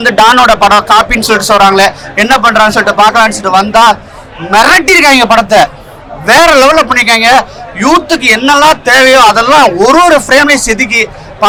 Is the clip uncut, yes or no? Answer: yes